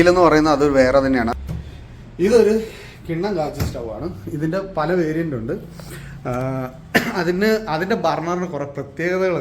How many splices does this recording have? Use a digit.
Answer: 1